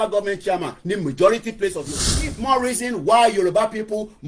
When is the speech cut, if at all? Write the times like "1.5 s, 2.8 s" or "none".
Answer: 2.0 s